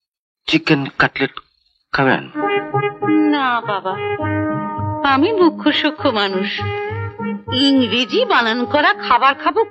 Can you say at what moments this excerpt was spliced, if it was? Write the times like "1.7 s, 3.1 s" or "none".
none